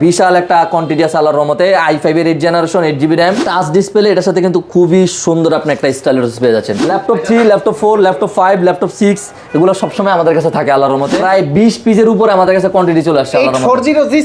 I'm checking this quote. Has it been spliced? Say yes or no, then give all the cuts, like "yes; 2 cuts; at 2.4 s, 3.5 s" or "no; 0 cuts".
yes; 3 cuts; at 3.4 s, 6.8 s, 11.1 s